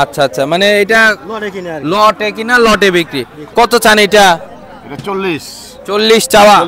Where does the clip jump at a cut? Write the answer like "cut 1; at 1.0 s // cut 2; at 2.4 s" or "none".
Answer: cut 1; at 3.4 s